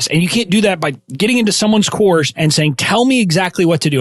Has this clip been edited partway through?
yes; 2 cuts; at 1.0 s, 2.3 s

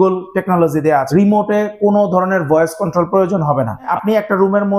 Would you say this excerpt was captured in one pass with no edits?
no; 2 cuts; at 1.1 s, 3.9 s

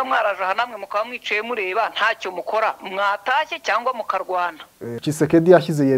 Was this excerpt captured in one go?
no; 1 cut; at 5.0 s

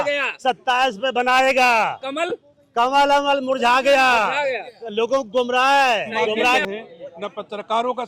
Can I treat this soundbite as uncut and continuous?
no; 1 cut; at 6.6 s

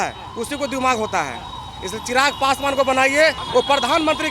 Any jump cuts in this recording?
yes; 1 cut; at 3.4 s

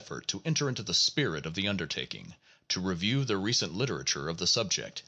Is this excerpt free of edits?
no; 1 cut; at 3.1 s

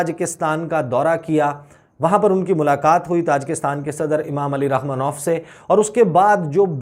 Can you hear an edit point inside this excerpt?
no; 0 cuts

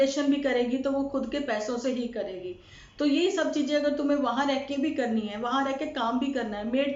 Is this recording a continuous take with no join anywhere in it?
yes; 0 cuts

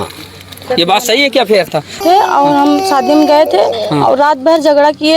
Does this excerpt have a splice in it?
yes; 1 cut; at 2.0 s

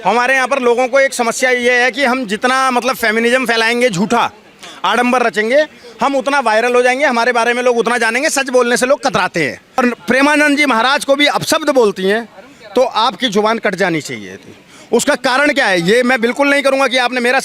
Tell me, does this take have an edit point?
yes; 1 cut; at 9.8 s

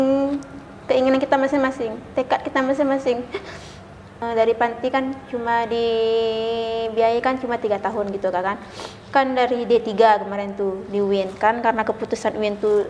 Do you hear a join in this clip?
yes; 1 cut; at 4.2 s

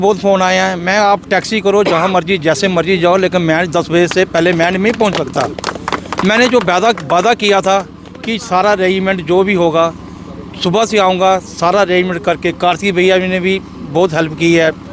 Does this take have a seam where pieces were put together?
no; 0 cuts

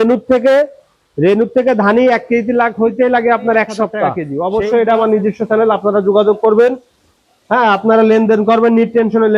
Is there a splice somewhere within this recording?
yes; 1 cut; at 4.2 s

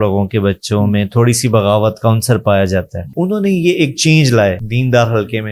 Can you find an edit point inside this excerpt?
yes; 2 cuts; at 3.1 s, 4.7 s

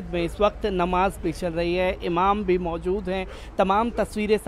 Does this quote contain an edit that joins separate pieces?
no; 0 cuts

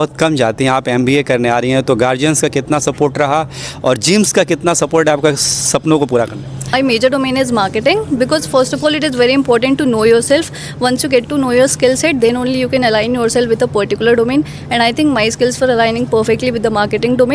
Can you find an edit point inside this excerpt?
yes; 1 cut; at 6.7 s

